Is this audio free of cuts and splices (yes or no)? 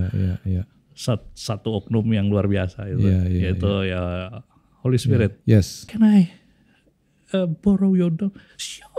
no